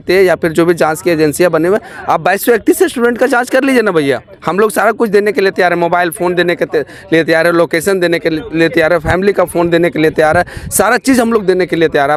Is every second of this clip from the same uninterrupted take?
yes; 0 cuts

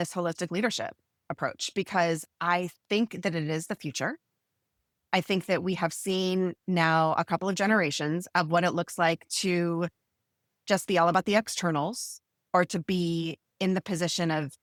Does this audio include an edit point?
no; 0 cuts

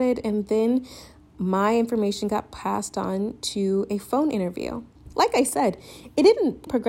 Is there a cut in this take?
no; 0 cuts

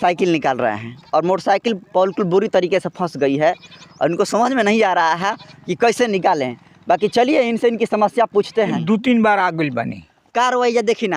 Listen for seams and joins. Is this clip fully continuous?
no; 1 cut; at 8.8 s

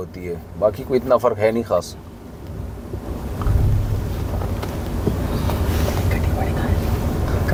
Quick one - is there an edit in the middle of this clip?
no; 0 cuts

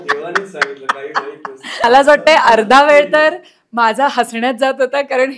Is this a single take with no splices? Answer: no; 1 cut; at 1.8 s

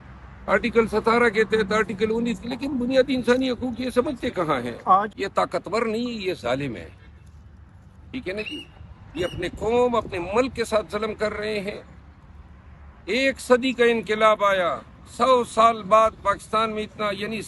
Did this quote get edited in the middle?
yes; 1 cut; at 5.1 s

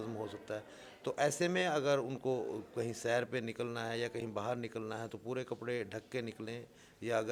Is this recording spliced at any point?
no; 0 cuts

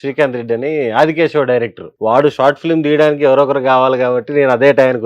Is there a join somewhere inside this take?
yes; 1 cut; at 1.8 s

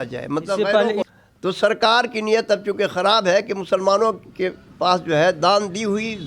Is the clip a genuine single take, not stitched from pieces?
no; 1 cut; at 1.1 s

